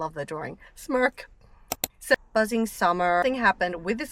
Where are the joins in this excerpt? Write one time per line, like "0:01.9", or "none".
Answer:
0:02.1
0:03.2